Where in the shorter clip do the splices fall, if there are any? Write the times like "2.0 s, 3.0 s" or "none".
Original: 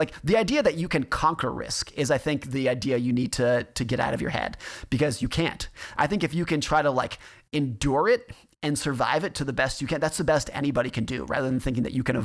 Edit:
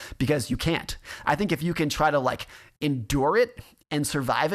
none